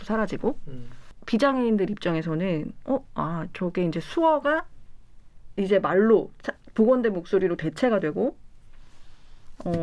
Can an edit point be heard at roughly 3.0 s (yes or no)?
no